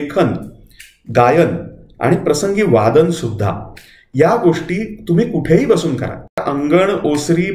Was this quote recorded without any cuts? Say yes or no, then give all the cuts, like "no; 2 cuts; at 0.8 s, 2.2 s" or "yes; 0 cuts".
no; 1 cut; at 6.5 s